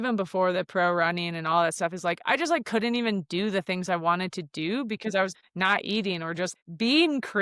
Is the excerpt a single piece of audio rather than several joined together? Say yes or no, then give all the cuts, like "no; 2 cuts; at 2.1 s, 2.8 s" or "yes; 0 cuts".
no; 2 cuts; at 5.3 s, 6.5 s